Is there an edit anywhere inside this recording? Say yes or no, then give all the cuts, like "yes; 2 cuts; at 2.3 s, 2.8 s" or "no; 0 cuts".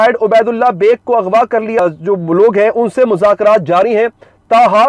yes; 1 cut; at 1.8 s